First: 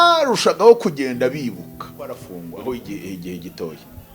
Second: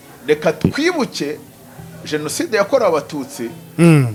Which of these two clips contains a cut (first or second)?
first